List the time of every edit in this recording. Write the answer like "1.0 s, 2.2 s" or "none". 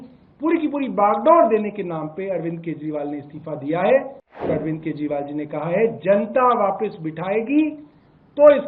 4.5 s